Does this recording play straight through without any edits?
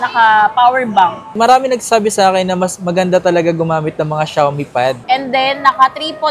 no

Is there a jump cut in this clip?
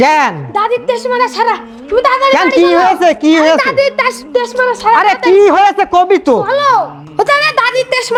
no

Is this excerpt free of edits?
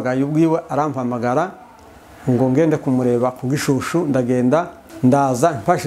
no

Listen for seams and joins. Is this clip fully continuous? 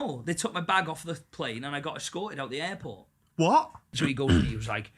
no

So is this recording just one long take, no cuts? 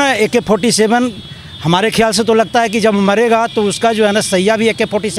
yes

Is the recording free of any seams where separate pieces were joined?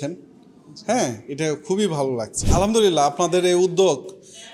no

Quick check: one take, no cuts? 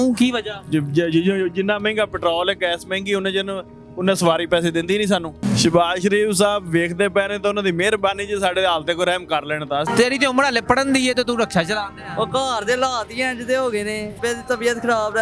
no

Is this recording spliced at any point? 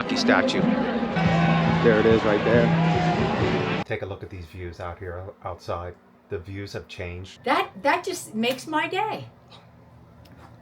yes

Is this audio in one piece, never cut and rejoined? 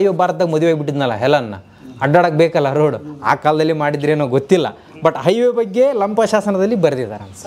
yes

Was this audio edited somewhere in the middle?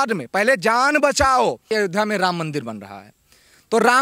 yes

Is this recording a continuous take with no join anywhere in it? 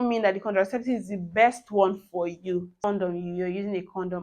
no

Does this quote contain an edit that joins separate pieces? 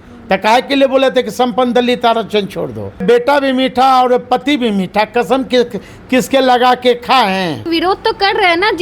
yes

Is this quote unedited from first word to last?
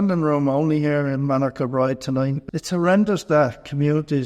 no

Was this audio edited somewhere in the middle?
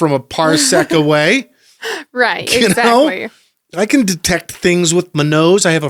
no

